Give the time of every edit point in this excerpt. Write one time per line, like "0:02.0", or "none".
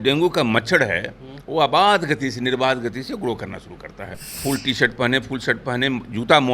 0:04.4